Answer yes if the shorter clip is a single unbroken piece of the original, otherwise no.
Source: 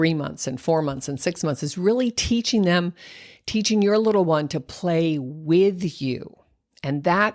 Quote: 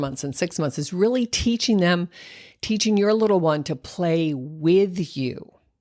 yes